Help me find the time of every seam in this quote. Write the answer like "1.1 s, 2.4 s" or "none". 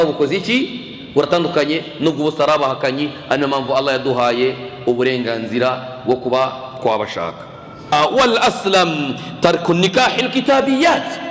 7.9 s